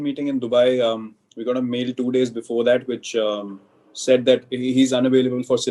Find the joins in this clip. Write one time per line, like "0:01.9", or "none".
none